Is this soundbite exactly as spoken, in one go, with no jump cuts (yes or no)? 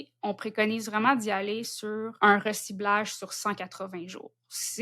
no